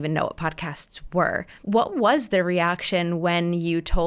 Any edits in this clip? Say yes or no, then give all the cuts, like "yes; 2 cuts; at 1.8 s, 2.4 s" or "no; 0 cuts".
no; 0 cuts